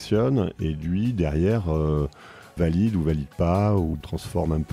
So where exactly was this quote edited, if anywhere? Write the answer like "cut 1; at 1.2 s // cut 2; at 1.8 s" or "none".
cut 1; at 2.5 s // cut 2; at 3.9 s